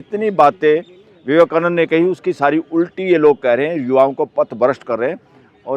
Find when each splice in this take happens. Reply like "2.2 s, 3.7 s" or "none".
none